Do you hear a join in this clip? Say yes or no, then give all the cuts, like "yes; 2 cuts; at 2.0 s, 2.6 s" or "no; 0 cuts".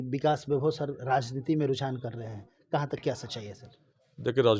no; 0 cuts